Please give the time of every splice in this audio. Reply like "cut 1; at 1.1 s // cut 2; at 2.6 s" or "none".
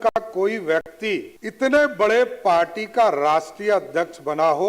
cut 1; at 1.4 s